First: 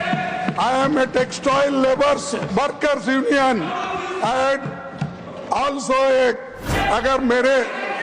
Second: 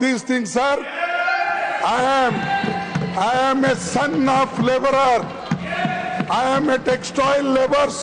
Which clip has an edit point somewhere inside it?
first; 1 cut; at 6.7 s

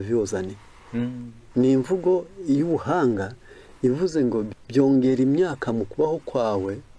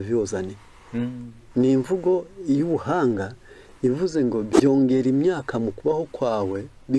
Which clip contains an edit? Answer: second; 1 cut; at 4.5 s

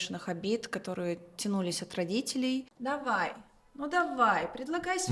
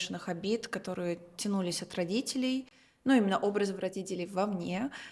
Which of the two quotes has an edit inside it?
first; 1 cut; at 2.7 s

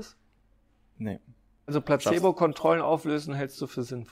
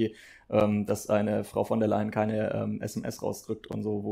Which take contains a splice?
first; 1 cut; at 1.7 s

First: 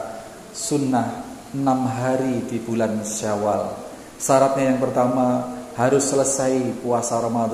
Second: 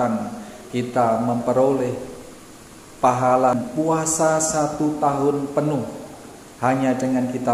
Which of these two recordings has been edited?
second; 1 cut; at 3.5 s

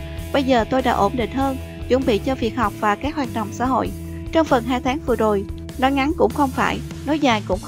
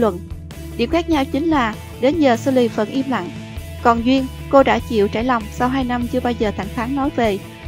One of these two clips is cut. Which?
second; 1 cut; at 1.7 s

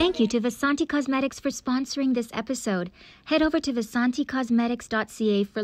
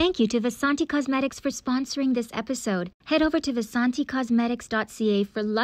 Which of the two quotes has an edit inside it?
second; 1 cut; at 2.9 s

